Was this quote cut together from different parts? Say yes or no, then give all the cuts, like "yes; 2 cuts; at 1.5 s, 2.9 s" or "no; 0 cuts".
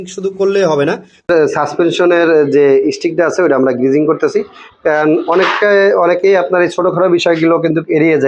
yes; 1 cut; at 1.3 s